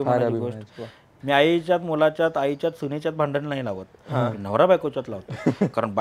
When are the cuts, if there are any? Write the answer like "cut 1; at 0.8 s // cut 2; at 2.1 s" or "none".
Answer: cut 1; at 1.1 s